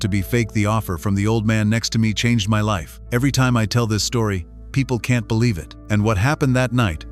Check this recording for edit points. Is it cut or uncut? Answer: cut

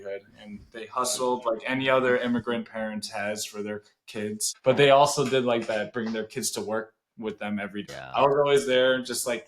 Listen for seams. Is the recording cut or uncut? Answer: cut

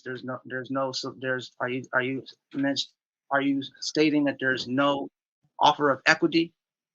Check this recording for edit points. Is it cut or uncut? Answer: uncut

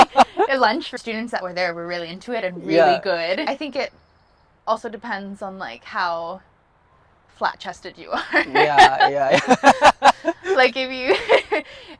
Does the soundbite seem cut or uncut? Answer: cut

